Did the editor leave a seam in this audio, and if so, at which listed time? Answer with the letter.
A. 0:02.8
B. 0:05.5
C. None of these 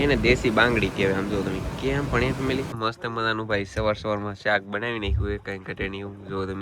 A